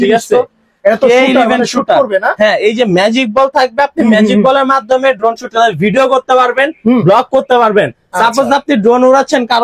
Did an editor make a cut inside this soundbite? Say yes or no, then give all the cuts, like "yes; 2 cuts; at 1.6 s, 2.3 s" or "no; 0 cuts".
no; 0 cuts